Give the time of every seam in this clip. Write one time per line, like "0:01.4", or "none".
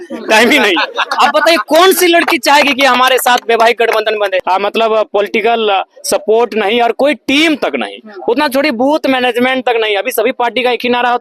0:04.4